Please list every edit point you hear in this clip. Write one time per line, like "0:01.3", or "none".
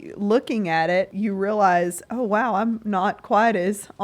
0:01.1